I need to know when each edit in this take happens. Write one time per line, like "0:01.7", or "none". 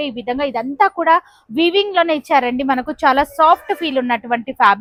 none